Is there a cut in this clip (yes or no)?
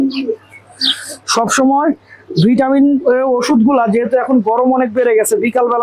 no